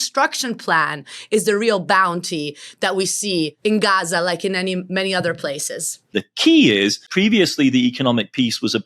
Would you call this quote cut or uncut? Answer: cut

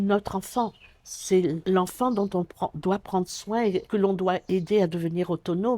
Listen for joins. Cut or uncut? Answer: cut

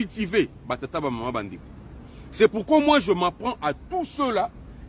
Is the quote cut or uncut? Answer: uncut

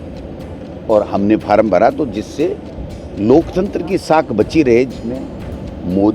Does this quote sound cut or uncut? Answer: cut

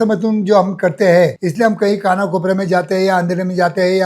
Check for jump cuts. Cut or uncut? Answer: cut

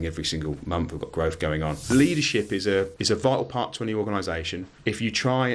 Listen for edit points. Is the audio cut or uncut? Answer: cut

